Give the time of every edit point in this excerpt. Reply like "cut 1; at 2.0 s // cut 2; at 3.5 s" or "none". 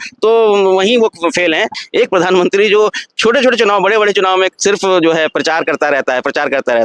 cut 1; at 1.8 s